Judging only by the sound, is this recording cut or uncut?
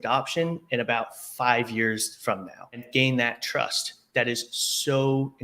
cut